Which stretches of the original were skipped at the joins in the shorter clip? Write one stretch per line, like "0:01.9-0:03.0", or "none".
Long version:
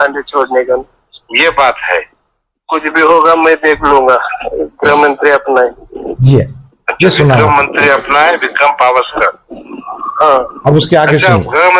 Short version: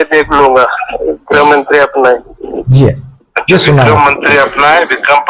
none